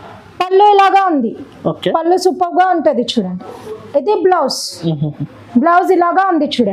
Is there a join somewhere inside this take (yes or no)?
no